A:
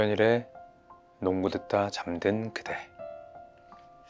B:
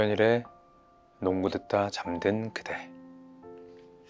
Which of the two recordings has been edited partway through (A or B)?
A